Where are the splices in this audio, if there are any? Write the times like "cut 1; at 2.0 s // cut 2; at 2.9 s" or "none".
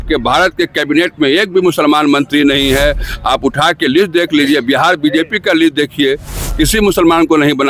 none